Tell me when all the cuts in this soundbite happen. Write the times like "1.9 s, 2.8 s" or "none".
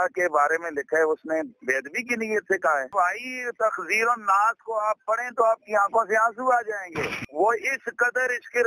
none